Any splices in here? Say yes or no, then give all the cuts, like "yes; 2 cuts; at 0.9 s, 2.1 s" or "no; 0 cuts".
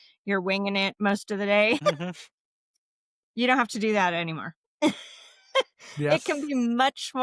yes; 1 cut; at 1.8 s